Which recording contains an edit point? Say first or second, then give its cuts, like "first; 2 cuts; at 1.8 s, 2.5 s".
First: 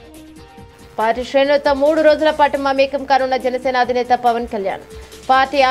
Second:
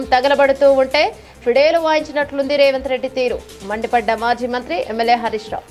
first; 1 cut; at 0.9 s